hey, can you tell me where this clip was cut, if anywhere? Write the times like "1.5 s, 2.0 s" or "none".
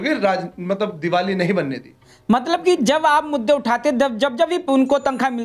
none